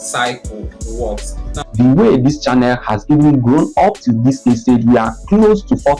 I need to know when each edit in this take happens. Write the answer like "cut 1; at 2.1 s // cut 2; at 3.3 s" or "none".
cut 1; at 1.6 s